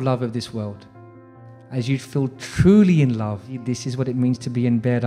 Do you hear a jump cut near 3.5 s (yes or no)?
yes